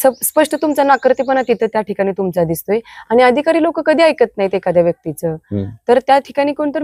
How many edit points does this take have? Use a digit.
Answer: 0